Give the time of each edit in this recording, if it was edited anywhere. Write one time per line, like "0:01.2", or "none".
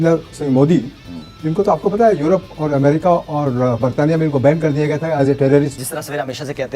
0:05.8